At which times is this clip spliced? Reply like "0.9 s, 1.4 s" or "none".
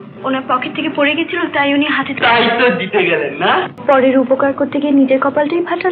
3.7 s